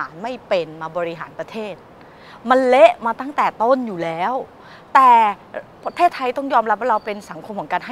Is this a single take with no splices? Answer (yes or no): yes